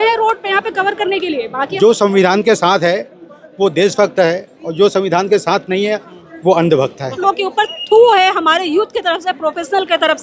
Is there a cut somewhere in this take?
yes; 2 cuts; at 1.7 s, 7.2 s

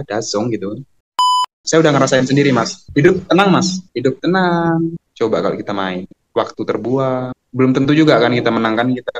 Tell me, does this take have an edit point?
yes; 4 cuts; at 1.5 s, 2.8 s, 3.8 s, 5.0 s

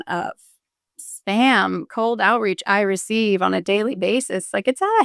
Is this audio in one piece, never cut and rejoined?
yes; 0 cuts

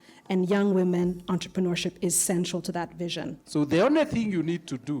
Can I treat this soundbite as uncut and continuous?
no; 1 cut; at 3.4 s

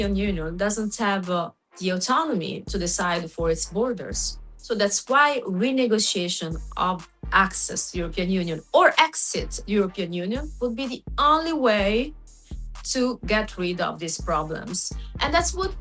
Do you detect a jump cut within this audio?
no; 0 cuts

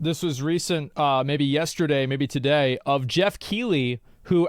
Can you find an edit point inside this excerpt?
no; 0 cuts

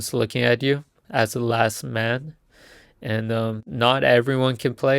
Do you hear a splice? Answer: yes; 2 cuts; at 1.0 s, 3.6 s

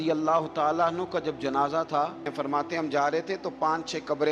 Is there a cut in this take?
yes; 1 cut; at 2.3 s

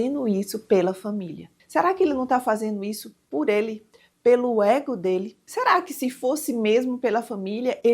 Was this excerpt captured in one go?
no; 1 cut; at 5.4 s

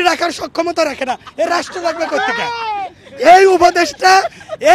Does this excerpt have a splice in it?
no; 0 cuts

